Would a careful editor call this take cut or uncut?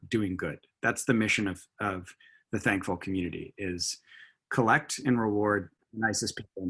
cut